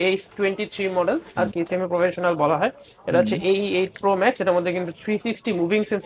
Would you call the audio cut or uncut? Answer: cut